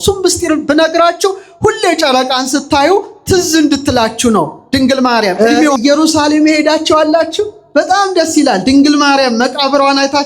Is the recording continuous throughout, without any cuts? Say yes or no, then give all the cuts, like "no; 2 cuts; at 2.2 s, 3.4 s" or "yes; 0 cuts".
no; 1 cut; at 5.5 s